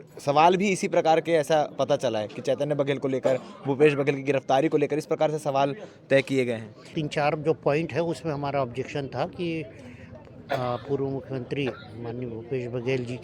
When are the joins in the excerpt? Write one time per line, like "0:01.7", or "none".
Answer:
0:06.9